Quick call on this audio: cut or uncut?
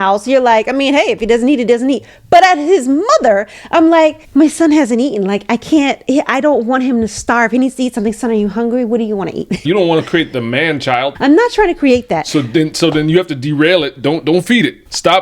cut